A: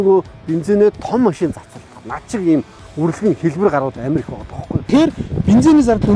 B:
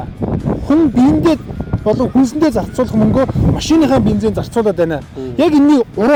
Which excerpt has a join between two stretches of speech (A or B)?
A